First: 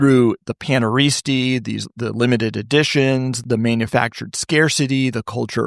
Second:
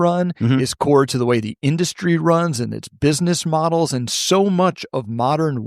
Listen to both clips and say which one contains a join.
first; 1 cut; at 3.4 s

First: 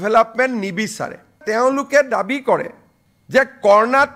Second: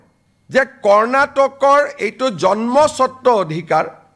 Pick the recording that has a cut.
first; 1 cut; at 1.4 s

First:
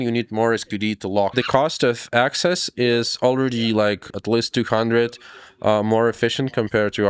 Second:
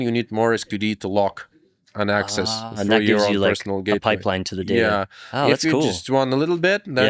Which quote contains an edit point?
first; 2 cuts; at 1.3 s, 4.1 s

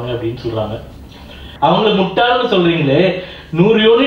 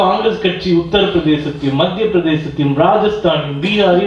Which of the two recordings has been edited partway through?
first; 1 cut; at 1.4 s

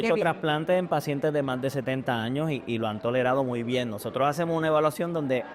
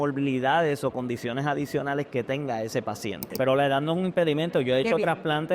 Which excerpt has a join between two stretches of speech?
second; 1 cut; at 3.4 s

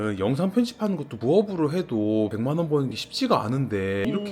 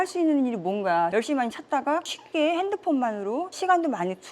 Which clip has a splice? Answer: second; 2 cuts; at 2.0 s, 3.5 s

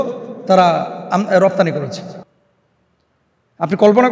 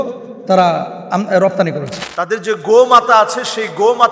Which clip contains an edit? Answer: second; 1 cut; at 2.0 s

